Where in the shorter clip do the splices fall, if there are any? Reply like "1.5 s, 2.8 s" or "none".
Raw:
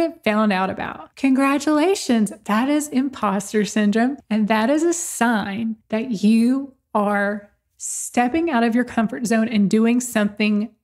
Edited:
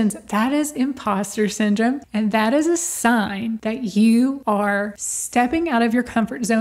3.6 s, 4.6 s